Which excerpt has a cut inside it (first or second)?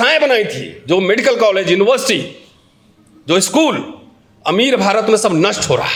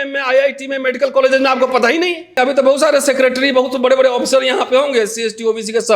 second